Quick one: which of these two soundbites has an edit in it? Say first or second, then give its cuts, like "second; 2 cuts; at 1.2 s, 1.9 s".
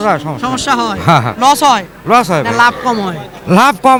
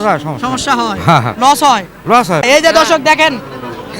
second; 1 cut; at 2.4 s